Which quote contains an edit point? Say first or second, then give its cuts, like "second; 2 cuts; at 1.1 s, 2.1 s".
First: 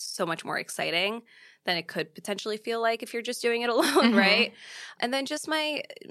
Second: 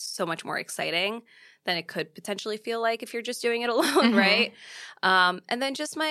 first; 1 cut; at 4.9 s